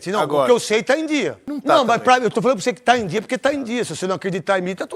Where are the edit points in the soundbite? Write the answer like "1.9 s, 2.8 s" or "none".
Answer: 1.5 s